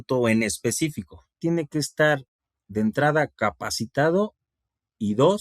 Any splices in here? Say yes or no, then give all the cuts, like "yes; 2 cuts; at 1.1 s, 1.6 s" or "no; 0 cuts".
yes; 1 cut; at 1.4 s